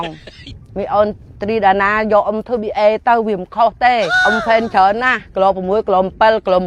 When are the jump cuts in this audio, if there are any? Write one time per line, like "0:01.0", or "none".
none